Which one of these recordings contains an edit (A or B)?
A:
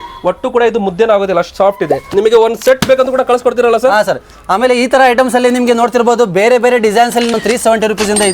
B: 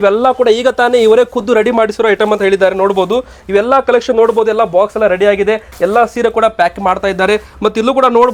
A